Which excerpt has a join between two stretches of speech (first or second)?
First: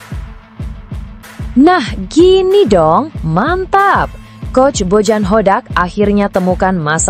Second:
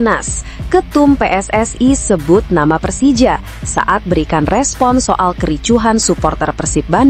first